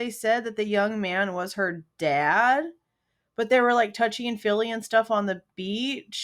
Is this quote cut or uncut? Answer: uncut